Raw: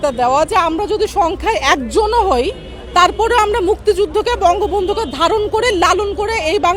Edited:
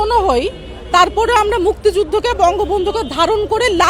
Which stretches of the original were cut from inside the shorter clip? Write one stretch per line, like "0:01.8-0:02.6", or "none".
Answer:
none